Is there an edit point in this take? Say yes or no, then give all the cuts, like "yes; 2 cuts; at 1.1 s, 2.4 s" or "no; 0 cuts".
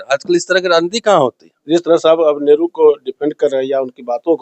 yes; 1 cut; at 1.6 s